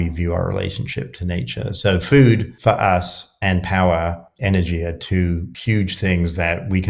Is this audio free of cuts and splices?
no; 3 cuts; at 2.5 s, 4.3 s, 5.5 s

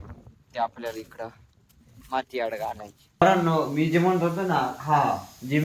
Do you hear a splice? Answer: yes; 1 cut; at 3.2 s

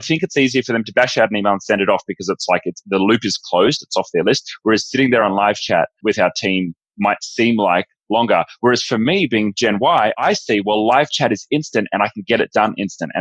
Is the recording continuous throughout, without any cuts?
yes; 0 cuts

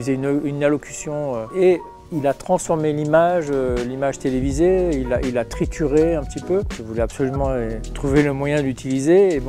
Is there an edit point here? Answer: yes; 3 cuts; at 1.5 s, 6.7 s, 7.9 s

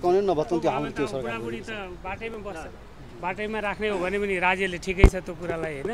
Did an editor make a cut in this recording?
no; 0 cuts

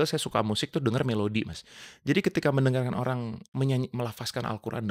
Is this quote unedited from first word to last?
no; 1 cut; at 3.4 s

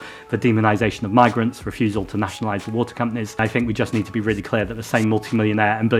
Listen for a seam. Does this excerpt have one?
yes; 1 cut; at 3.4 s

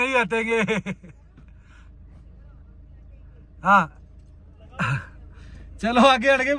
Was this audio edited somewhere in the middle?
no; 0 cuts

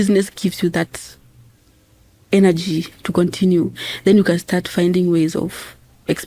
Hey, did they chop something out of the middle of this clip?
no; 0 cuts

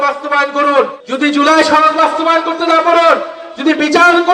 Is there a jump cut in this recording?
yes; 1 cut; at 1.0 s

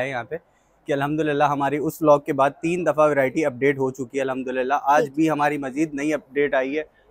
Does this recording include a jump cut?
no; 0 cuts

